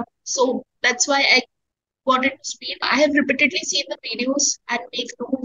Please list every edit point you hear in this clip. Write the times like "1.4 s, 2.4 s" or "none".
2.9 s